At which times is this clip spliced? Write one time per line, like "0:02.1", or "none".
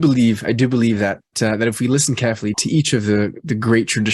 0:01.3
0:02.6